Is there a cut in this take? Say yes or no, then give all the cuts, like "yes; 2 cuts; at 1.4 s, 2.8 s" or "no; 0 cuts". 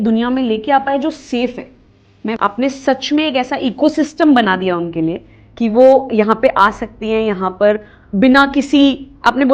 yes; 1 cut; at 2.4 s